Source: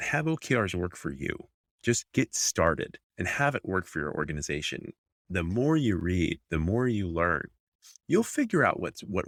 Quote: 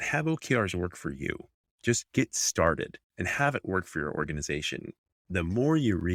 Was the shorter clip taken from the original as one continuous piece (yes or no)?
yes